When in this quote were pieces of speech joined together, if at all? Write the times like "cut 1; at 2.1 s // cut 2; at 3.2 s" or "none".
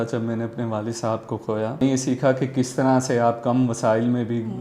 cut 1; at 1.8 s